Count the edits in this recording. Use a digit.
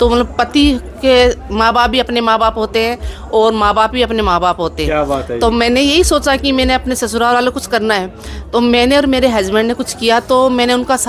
0